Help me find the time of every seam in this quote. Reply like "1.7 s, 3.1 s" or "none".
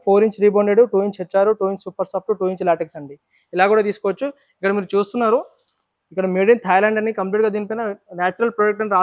none